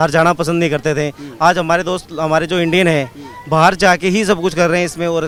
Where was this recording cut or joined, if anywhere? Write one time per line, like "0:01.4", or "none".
none